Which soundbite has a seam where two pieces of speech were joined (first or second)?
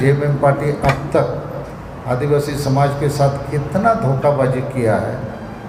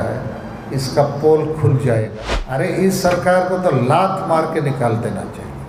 second